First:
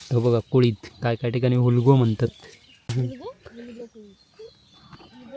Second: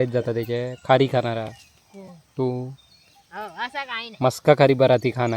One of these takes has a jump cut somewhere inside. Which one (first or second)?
first